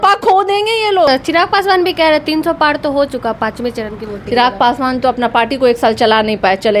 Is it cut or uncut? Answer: cut